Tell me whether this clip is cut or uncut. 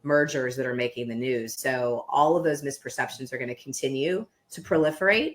cut